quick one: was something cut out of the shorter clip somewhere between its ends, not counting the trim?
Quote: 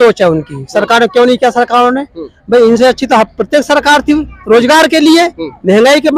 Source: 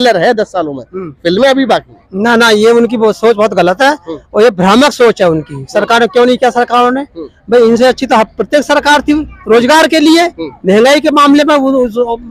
no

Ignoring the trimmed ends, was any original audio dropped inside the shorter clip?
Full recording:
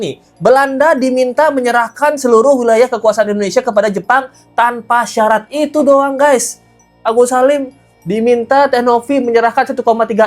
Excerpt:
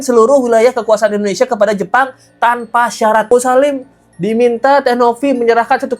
yes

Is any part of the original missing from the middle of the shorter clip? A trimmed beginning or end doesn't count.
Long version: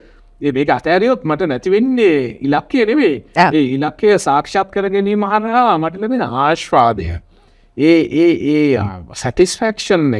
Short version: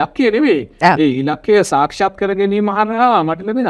no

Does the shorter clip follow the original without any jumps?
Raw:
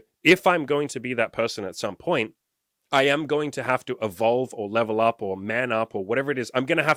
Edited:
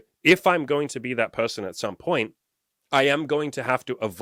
yes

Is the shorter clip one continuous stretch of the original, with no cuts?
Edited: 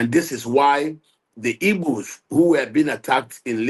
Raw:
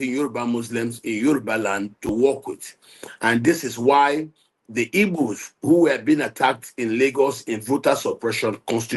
yes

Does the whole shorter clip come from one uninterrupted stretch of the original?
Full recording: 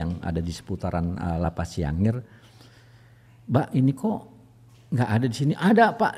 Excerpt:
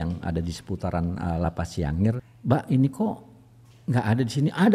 no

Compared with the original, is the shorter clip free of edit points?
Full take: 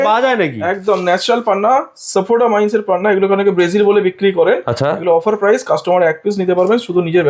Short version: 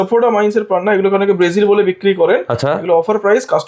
yes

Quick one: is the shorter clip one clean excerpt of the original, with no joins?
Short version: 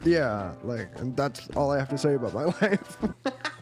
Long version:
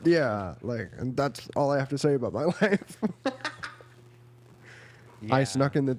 yes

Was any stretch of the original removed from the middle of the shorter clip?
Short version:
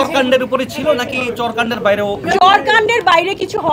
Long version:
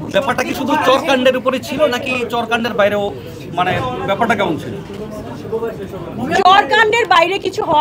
yes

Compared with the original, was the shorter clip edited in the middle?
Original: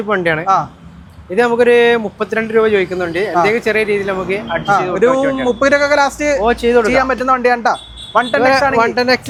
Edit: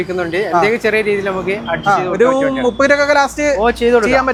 no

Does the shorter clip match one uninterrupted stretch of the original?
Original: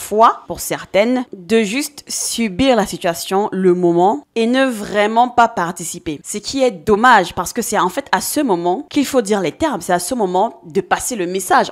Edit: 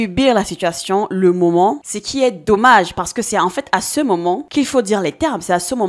no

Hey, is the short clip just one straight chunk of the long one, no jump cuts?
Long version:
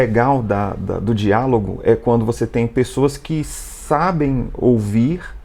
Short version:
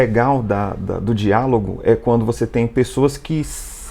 yes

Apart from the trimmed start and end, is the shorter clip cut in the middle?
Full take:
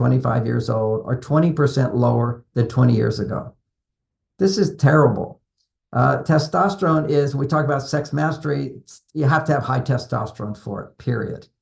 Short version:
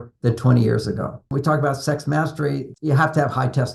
yes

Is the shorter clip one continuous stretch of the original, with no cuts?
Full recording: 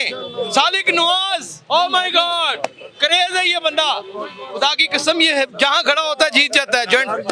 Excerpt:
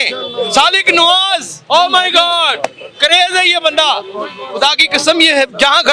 yes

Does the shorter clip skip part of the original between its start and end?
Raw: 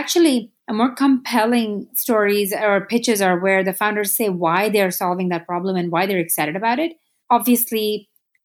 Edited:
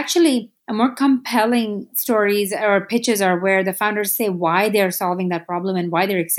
no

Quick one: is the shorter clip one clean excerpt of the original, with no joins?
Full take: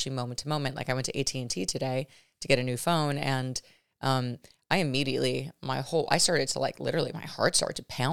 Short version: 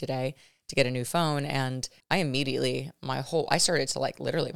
no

